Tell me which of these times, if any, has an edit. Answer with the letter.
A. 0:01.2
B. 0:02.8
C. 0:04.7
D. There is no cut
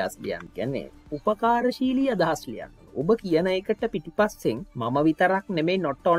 C